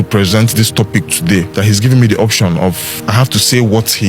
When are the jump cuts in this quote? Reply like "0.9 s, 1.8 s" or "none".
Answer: 1.5 s, 2.9 s